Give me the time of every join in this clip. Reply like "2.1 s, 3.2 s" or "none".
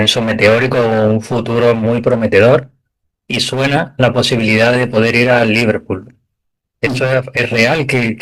none

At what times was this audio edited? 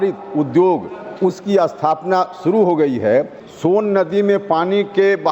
3.4 s

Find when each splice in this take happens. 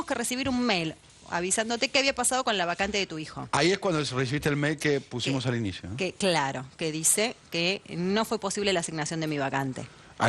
1.0 s

